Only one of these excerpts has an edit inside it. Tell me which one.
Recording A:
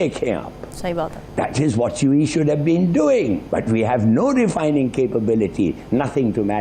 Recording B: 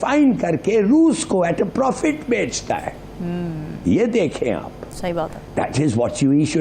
A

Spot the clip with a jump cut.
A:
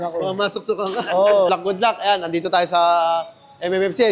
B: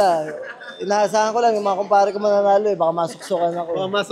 A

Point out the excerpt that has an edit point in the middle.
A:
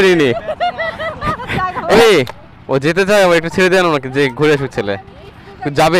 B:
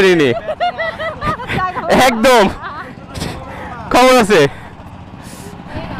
A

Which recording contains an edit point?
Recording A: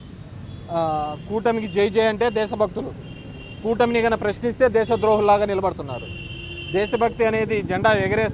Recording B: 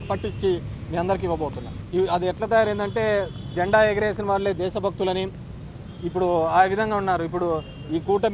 B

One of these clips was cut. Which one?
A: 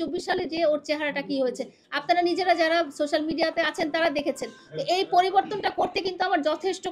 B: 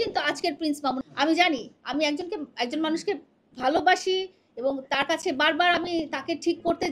B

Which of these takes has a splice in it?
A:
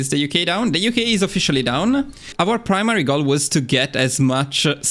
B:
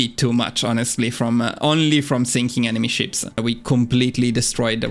B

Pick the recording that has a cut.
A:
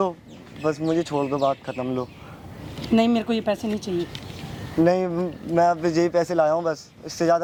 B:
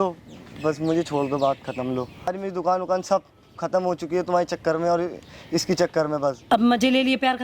B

